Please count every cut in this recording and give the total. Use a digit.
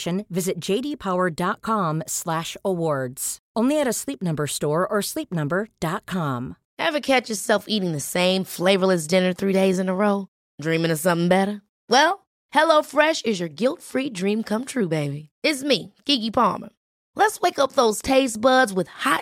1